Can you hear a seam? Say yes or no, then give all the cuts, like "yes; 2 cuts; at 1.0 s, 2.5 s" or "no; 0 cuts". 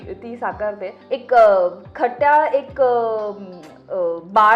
yes; 1 cut; at 0.9 s